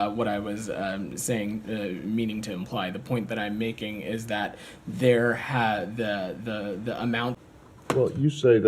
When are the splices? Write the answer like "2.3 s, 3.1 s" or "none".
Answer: 7.4 s